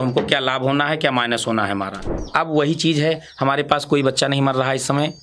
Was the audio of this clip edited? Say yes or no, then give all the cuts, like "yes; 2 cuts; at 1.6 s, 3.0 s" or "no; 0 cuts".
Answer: yes; 1 cut; at 2.1 s